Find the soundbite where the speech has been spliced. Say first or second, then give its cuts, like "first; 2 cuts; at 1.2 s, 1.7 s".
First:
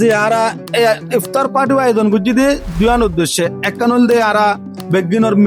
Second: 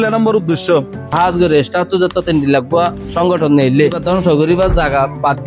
second; 2 cuts; at 1.0 s, 4.0 s